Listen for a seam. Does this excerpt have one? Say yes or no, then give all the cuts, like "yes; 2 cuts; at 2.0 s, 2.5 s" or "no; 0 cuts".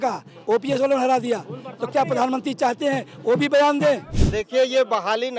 yes; 1 cut; at 4.2 s